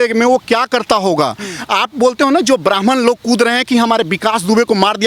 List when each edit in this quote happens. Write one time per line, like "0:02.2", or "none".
none